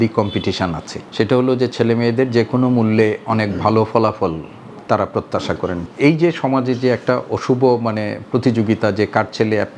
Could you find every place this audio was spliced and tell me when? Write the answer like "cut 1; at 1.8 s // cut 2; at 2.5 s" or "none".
cut 1; at 5.8 s